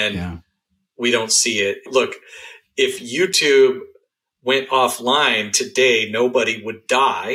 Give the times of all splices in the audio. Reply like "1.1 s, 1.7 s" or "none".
1.8 s